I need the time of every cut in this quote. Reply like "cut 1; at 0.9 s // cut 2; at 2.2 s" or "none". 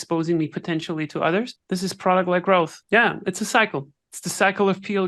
cut 1; at 1.6 s // cut 2; at 2.8 s